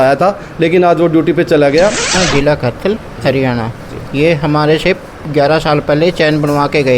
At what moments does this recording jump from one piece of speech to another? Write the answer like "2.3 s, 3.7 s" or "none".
2.1 s